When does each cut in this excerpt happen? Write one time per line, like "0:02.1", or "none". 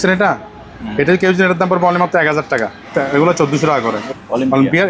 0:02.8
0:04.0